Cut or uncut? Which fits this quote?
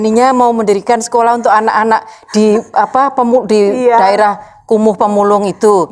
uncut